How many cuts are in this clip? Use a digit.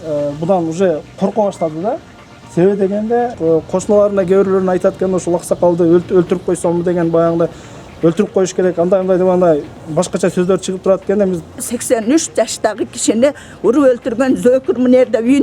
2